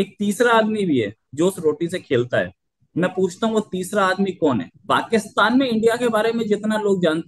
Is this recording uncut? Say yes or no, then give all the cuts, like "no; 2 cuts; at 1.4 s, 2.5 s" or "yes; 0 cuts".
no; 1 cut; at 4.7 s